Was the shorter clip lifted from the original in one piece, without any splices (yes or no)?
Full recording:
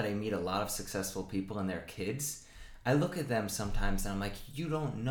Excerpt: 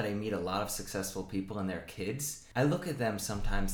no